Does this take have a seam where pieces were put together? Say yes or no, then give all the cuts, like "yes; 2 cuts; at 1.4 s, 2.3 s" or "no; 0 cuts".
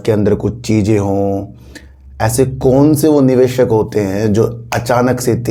no; 0 cuts